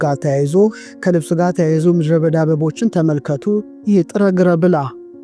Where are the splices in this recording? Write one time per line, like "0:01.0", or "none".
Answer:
0:03.8